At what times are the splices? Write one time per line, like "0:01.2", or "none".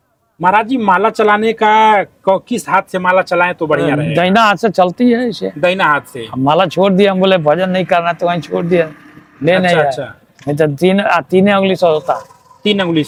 none